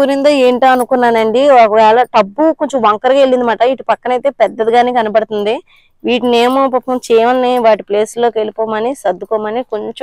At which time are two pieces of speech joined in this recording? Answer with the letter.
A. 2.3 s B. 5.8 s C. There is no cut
C